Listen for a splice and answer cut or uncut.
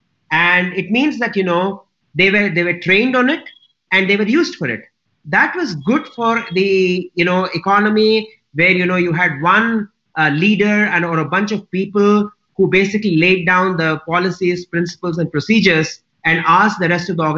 uncut